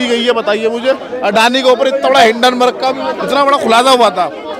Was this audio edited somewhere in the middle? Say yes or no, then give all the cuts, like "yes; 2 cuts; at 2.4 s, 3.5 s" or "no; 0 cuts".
yes; 2 cuts; at 1.1 s, 2.9 s